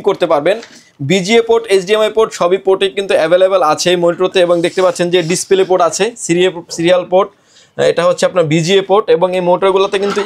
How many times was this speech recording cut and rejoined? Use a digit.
0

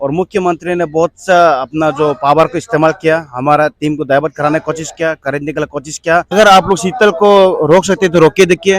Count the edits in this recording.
1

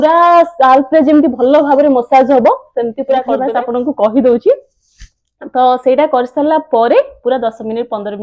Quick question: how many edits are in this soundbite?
1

